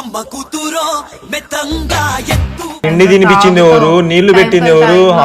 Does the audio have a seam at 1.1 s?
no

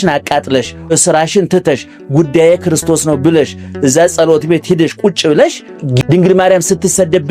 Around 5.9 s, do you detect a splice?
yes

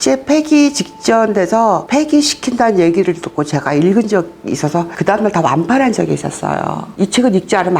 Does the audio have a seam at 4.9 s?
yes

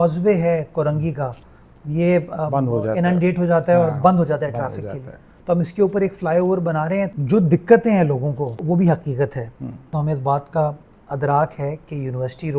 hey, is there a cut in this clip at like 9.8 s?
yes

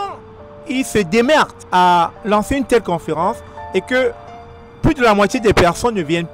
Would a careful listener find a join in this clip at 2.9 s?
no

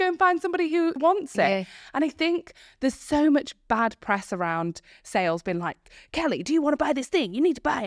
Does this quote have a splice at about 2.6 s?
no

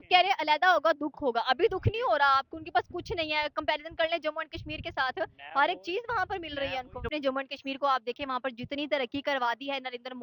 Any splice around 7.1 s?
yes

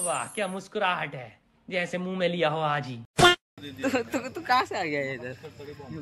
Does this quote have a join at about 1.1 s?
no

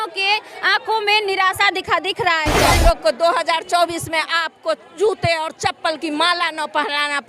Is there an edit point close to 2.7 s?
yes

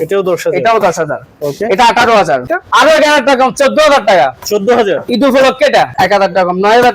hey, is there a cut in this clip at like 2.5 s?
yes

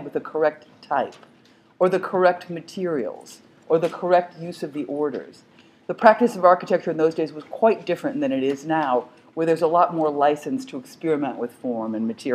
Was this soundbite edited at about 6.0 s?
yes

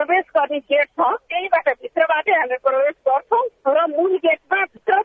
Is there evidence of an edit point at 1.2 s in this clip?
yes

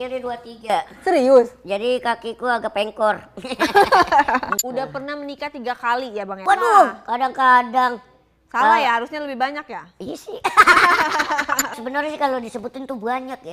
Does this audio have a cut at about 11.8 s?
yes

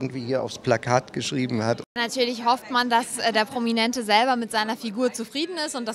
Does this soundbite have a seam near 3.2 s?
no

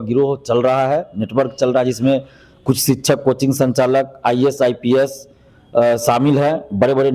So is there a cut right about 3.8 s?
no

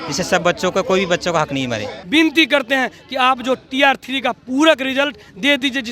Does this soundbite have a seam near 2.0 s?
yes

